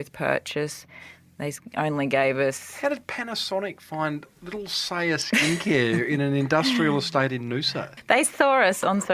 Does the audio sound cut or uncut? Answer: cut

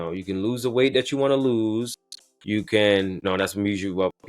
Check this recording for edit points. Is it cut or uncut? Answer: cut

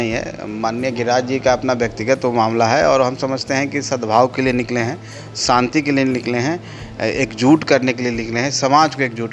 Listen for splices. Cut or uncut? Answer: uncut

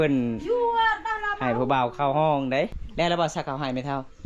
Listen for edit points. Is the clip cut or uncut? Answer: cut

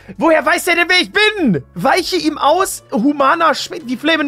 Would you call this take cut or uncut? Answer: cut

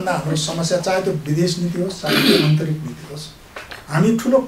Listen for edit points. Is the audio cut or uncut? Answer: uncut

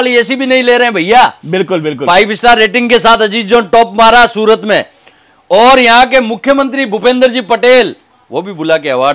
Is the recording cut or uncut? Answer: uncut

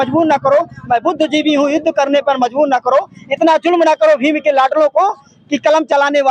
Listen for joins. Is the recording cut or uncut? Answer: uncut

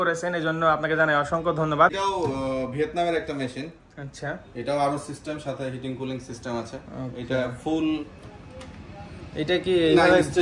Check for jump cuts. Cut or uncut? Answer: cut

